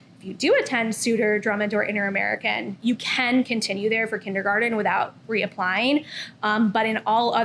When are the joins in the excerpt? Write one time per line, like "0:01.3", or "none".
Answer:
none